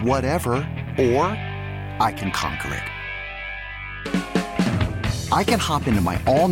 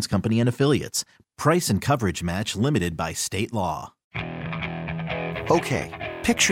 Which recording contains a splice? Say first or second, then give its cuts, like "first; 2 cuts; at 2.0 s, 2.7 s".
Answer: second; 1 cut; at 4.0 s